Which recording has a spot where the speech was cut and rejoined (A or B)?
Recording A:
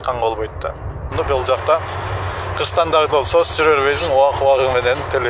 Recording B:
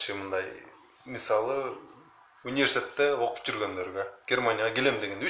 A